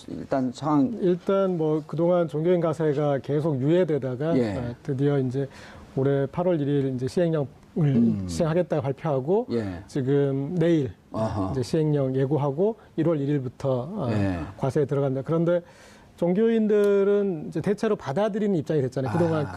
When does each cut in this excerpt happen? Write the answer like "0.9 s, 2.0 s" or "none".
8.2 s